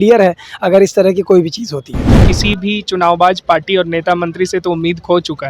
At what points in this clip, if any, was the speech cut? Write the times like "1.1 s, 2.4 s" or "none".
2.2 s